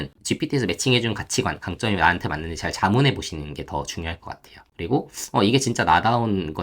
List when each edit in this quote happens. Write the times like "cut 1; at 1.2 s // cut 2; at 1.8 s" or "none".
cut 1; at 4.6 s